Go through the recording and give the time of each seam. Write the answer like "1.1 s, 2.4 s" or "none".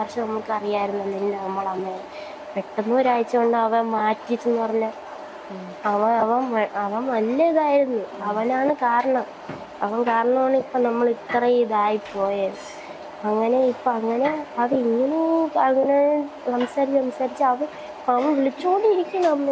none